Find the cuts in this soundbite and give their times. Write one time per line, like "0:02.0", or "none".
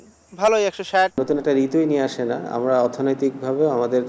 0:01.2